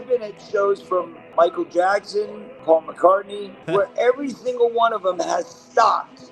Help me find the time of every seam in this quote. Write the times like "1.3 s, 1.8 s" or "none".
1.2 s, 2.5 s, 3.6 s

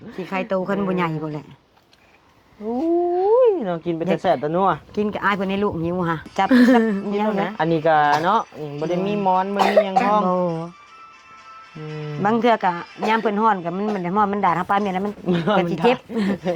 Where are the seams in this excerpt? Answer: 7.1 s

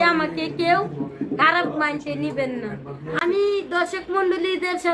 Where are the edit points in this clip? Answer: 3.2 s

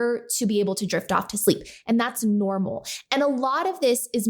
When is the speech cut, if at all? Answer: none

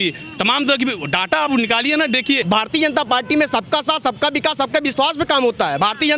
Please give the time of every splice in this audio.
2.4 s

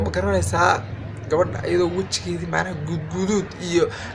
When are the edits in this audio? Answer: none

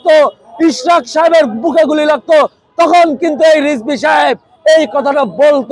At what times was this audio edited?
none

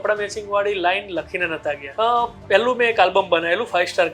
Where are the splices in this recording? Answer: 1.8 s

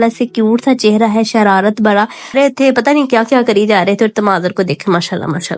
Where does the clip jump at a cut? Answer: 2.3 s

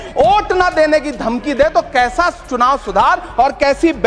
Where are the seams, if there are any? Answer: none

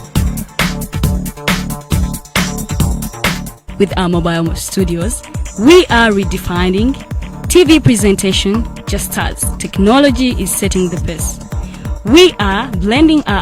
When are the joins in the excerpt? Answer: 2.8 s

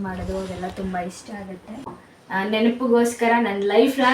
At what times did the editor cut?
2.0 s

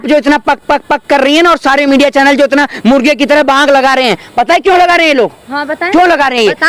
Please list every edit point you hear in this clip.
none

